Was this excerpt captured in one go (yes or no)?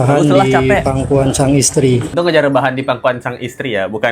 no